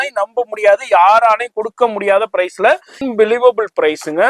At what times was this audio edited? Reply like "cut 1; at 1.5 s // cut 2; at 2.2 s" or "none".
cut 1; at 3.0 s